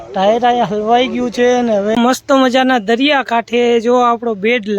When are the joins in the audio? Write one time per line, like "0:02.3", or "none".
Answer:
0:01.9